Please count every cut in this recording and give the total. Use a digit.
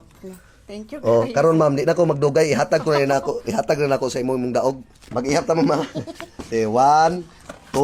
1